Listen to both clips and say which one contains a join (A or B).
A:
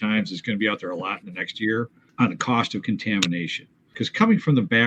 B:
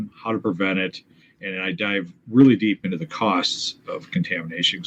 A